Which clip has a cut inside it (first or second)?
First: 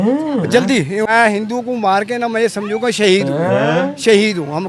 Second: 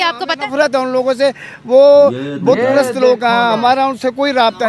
first